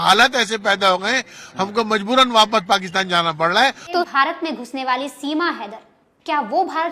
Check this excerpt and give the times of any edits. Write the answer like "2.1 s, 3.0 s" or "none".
4.1 s